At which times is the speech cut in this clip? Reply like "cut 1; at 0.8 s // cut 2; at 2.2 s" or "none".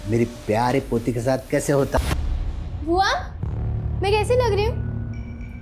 cut 1; at 2.0 s